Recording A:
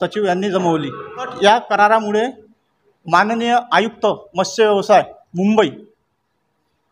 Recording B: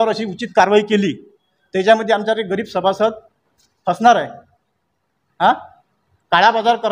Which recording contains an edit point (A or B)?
A